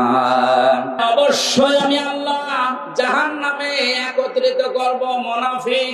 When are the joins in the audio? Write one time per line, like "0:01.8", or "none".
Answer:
0:01.0